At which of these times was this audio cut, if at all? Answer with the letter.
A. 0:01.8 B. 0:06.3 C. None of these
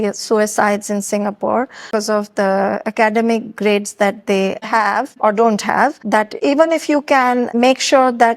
A